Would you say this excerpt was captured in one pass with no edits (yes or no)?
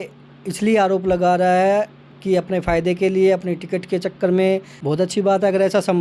no